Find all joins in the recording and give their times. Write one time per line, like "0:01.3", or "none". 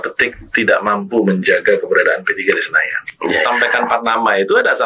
0:03.7